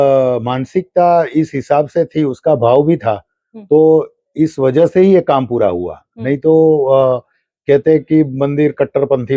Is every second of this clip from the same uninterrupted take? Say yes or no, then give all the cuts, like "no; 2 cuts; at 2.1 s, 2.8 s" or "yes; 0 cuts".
yes; 0 cuts